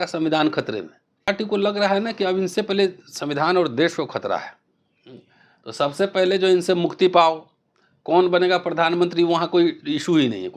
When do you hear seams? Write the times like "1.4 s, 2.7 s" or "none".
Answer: 1.3 s